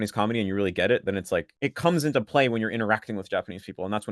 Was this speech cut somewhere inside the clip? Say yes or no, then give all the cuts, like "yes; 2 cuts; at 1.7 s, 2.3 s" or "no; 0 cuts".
yes; 1 cut; at 1.5 s